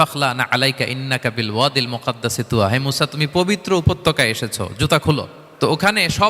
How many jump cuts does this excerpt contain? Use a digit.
1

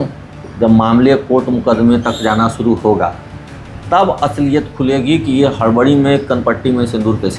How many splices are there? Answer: 0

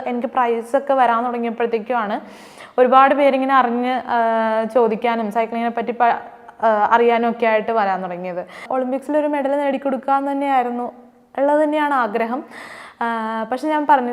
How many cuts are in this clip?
1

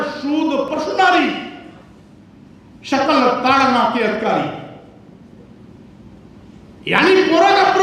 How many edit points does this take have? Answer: 0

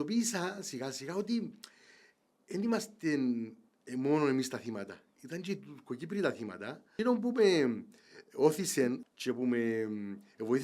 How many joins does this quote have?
2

